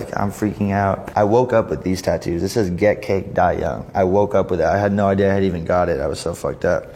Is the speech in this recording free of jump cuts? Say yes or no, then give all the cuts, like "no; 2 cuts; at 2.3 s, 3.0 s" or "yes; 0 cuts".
no; 1 cut; at 1.0 s